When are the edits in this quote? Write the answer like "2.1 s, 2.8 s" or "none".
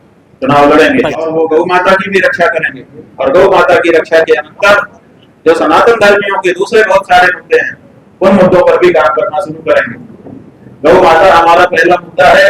1.3 s